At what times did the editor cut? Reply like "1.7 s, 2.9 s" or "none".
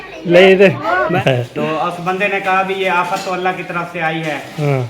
1.1 s

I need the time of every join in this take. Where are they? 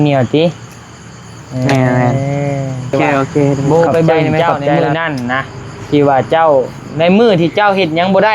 2.9 s

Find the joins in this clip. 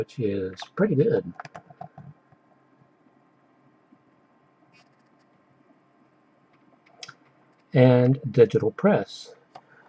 1.1 s

